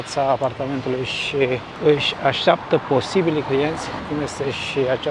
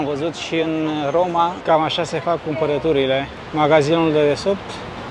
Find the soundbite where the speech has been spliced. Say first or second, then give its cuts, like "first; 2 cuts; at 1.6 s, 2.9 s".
second; 1 cut; at 1.6 s